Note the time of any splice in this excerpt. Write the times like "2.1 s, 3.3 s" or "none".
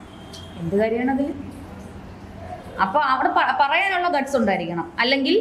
none